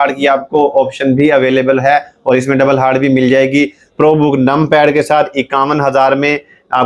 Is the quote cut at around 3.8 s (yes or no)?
yes